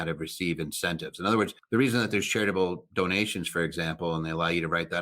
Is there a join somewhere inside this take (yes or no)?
yes